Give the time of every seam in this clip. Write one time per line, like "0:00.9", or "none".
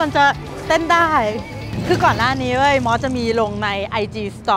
none